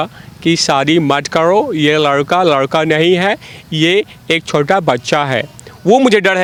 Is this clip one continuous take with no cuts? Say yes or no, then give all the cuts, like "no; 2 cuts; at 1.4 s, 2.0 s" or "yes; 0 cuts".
yes; 0 cuts